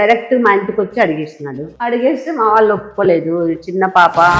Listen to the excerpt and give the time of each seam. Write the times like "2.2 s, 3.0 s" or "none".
1.7 s